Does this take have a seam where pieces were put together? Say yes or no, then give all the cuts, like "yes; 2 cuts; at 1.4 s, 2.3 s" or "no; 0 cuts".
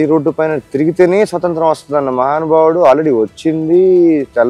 no; 0 cuts